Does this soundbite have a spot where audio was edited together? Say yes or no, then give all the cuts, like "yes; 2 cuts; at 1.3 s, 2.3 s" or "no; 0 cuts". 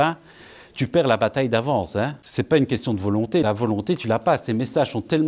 yes; 2 cuts; at 2.2 s, 3.4 s